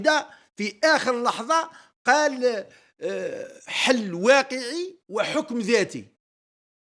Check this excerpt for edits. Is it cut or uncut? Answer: uncut